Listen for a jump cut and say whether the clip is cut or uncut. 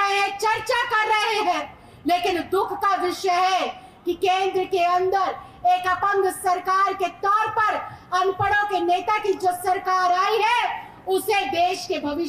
uncut